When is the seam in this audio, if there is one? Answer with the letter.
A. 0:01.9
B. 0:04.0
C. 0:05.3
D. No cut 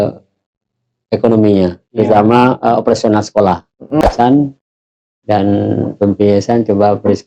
B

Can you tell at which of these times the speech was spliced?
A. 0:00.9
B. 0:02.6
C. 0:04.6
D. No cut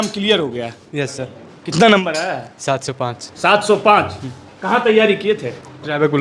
D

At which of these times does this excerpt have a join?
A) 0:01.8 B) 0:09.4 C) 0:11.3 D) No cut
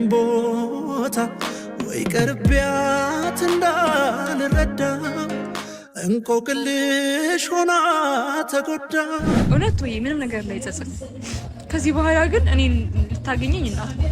B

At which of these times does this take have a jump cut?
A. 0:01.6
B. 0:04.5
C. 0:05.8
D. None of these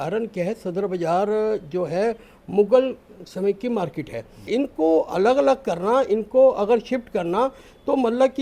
B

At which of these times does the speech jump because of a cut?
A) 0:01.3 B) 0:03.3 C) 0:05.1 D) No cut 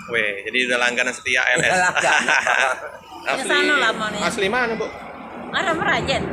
B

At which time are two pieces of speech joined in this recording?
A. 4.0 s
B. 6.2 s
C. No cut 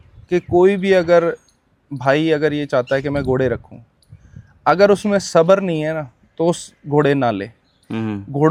C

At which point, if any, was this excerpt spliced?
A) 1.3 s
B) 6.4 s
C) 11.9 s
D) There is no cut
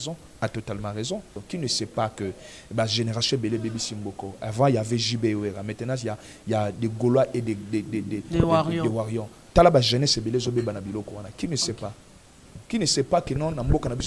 A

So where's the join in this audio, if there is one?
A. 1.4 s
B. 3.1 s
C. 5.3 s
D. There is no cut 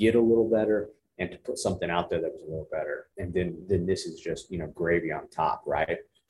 B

